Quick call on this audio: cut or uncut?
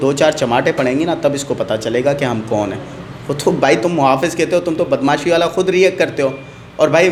uncut